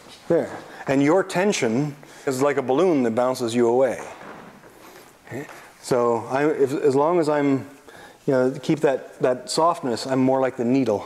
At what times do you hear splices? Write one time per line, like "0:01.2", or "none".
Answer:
0:02.3